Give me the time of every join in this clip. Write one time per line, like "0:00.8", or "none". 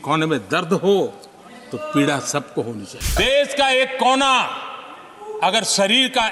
0:03.1